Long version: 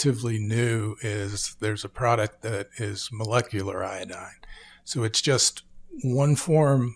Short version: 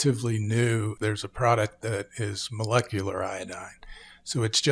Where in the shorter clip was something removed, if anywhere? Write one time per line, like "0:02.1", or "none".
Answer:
0:00.9